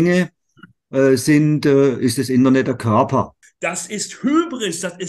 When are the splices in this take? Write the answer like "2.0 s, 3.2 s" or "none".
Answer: 3.4 s